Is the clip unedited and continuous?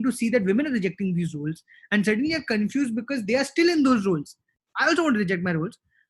no; 1 cut; at 4.5 s

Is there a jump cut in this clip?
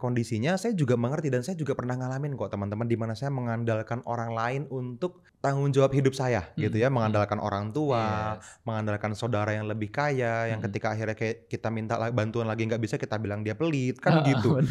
yes; 1 cut; at 5.3 s

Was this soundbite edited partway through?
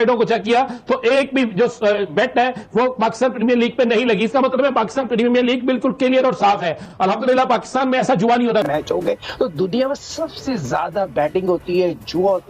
yes; 1 cut; at 8.7 s

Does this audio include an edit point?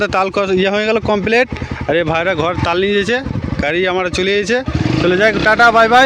no; 0 cuts

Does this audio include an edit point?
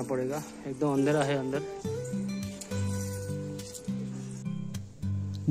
no; 0 cuts

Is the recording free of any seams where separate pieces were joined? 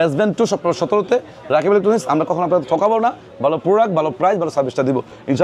yes; 0 cuts

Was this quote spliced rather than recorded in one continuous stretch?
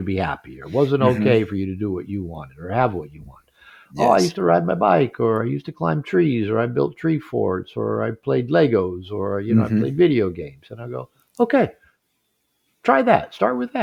no; 0 cuts

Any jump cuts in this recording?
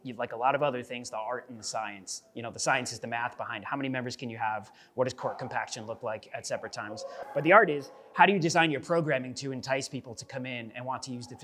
no; 0 cuts

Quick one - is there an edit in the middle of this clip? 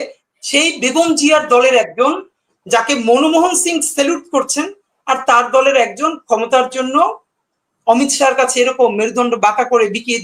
no; 0 cuts

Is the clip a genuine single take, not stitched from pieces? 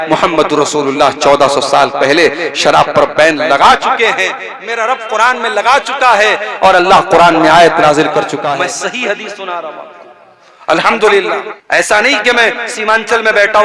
no; 2 cuts; at 8.4 s, 11.5 s

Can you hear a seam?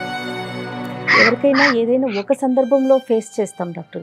no; 0 cuts

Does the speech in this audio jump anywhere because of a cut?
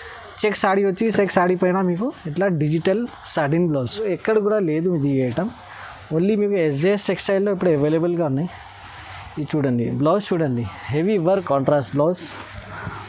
yes; 2 cuts; at 4.0 s, 11.4 s

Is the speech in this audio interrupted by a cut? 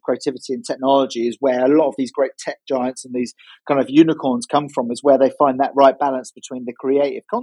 no; 0 cuts

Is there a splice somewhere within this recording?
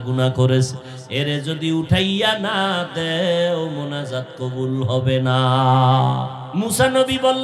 yes; 1 cut; at 6.4 s

